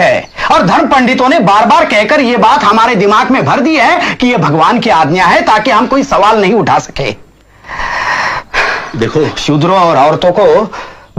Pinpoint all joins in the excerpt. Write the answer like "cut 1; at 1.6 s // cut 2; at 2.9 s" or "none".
none